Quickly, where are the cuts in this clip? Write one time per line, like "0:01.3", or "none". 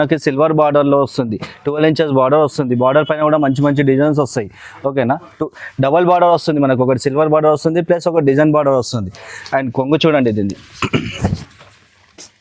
none

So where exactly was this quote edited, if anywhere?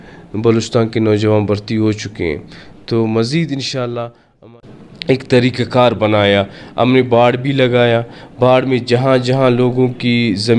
0:04.4

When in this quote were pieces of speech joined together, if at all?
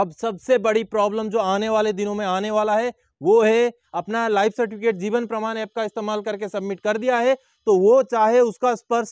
0:03.9

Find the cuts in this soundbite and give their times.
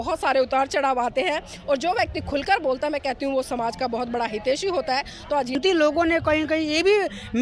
0:05.5

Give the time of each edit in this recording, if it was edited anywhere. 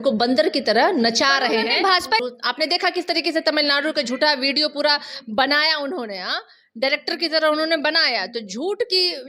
0:02.2

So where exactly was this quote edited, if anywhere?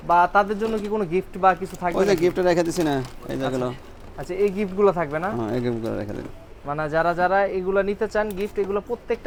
none

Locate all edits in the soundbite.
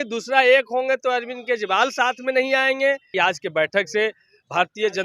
0:03.1

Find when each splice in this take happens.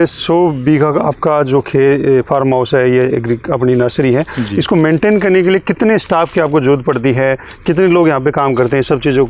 none

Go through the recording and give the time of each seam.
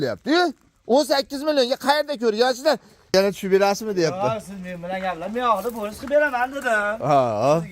0:03.1

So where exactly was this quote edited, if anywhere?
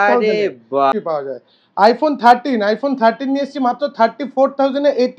0:00.9

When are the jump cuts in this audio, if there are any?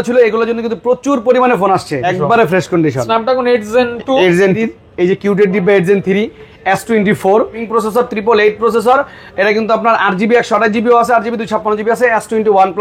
0:02.1
0:04.6
0:07.6

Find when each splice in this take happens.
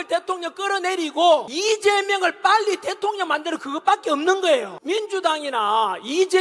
0:01.5
0:04.7

